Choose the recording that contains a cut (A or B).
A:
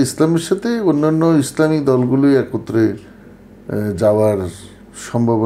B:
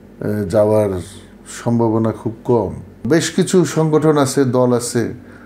B